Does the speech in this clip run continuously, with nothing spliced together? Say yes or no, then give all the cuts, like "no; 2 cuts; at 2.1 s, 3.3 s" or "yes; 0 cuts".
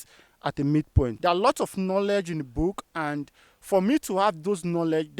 no; 1 cut; at 1.2 s